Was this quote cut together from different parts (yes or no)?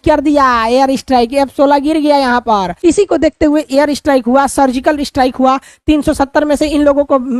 yes